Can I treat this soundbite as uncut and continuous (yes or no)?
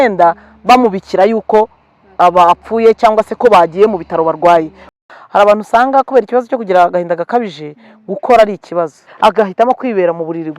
no